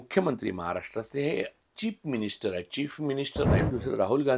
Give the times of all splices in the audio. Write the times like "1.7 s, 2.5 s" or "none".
1.5 s, 3.6 s